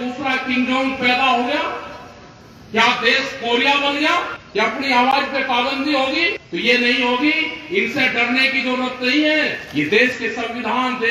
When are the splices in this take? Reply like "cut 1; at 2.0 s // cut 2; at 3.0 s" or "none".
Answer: cut 1; at 4.4 s // cut 2; at 6.4 s // cut 3; at 9.6 s

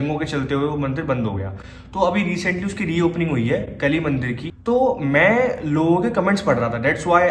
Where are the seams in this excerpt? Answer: none

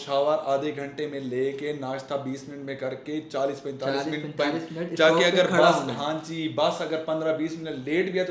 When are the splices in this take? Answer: none

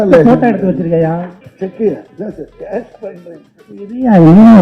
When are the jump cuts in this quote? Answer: cut 1; at 1.4 s // cut 2; at 2.1 s

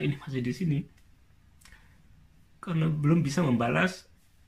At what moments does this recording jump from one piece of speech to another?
none

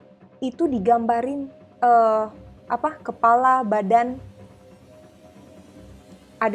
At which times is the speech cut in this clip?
none

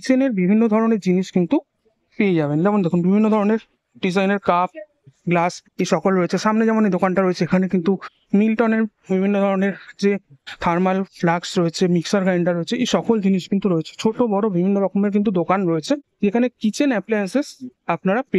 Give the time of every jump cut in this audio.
cut 1; at 16.1 s

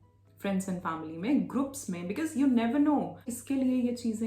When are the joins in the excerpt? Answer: cut 1; at 3.3 s

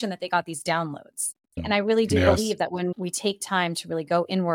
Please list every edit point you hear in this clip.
cut 1; at 1.6 s // cut 2; at 2.9 s

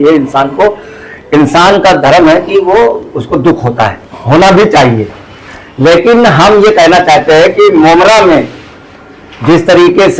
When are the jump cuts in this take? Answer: none

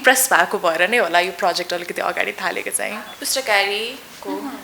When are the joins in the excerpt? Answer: cut 1; at 3.1 s

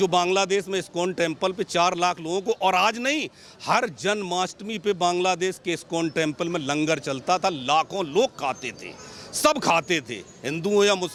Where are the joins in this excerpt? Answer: none

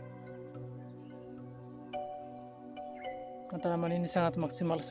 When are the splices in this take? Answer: cut 1; at 3.5 s

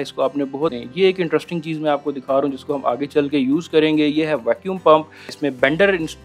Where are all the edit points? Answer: cut 1; at 0.8 s // cut 2; at 5.3 s

